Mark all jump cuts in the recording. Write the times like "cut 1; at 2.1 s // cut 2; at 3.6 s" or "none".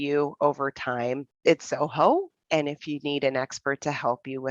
cut 1; at 1.3 s